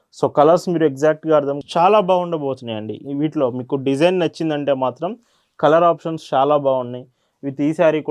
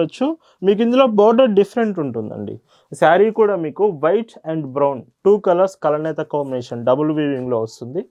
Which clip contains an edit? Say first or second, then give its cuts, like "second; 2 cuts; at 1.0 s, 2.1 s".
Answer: first; 1 cut; at 1.6 s